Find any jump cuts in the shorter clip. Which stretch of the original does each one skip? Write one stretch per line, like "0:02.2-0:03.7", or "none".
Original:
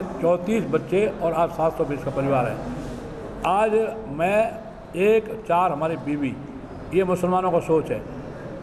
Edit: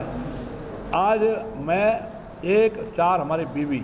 none